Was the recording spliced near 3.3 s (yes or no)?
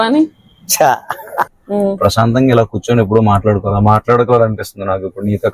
no